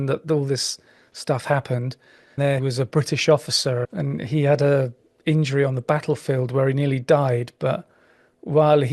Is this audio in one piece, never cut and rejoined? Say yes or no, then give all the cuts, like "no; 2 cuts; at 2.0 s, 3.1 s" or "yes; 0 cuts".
no; 2 cuts; at 2.5 s, 3.9 s